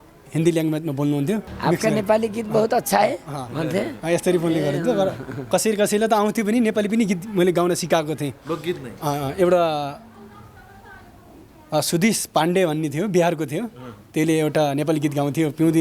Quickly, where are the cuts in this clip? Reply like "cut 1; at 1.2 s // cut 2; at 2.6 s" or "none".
cut 1; at 1.5 s